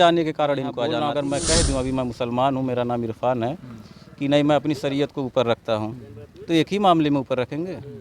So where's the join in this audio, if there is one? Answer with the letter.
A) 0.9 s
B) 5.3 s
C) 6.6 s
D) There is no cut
A